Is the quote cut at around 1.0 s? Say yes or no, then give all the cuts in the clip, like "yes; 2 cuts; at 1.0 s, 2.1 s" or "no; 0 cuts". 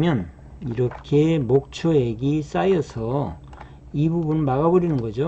no; 0 cuts